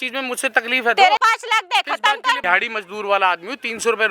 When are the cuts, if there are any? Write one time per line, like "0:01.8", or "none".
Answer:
0:01.2
0:02.4